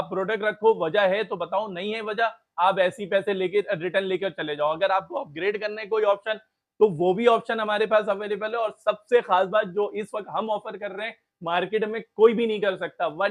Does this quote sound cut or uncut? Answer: uncut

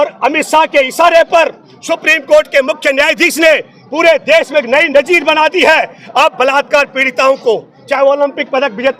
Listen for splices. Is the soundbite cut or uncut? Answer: uncut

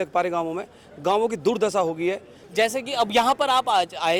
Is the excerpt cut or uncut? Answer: uncut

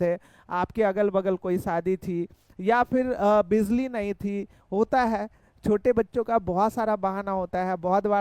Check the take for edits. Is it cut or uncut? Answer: uncut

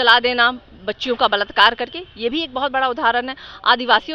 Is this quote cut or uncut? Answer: uncut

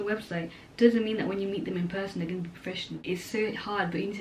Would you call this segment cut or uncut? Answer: cut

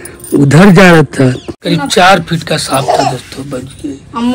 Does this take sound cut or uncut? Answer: cut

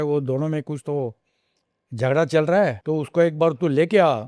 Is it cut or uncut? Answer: cut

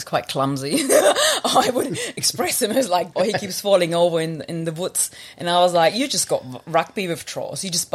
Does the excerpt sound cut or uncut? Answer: cut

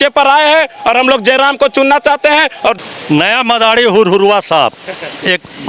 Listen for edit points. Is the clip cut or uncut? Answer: cut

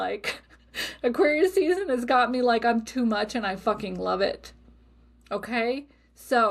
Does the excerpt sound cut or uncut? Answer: uncut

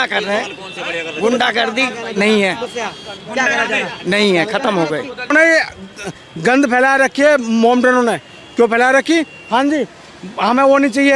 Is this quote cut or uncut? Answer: cut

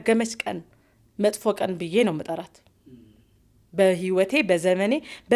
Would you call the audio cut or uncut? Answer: uncut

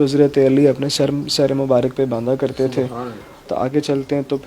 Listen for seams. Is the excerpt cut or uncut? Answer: uncut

